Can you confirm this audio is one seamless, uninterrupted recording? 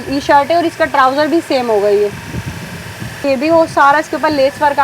no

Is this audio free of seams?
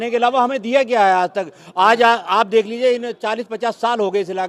yes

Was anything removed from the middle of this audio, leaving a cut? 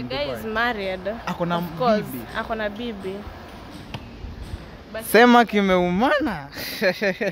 no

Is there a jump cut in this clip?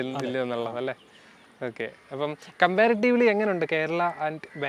no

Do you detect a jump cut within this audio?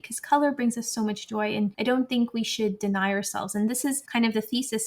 yes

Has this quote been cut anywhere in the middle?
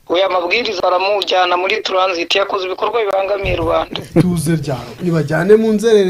yes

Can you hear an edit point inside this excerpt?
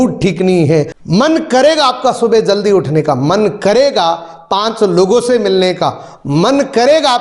yes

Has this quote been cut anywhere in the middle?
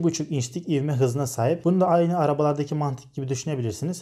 yes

